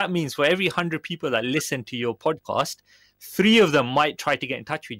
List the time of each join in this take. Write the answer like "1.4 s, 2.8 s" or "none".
none